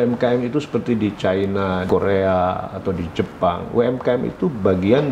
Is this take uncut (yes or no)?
no